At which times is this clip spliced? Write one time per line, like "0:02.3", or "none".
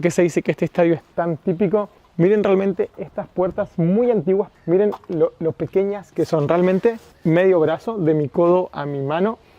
0:02.0
0:04.5
0:07.1